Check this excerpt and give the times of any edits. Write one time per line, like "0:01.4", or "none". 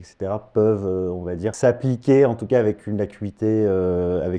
0:01.6